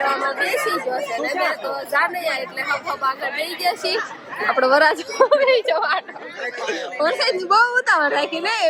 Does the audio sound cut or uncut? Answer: uncut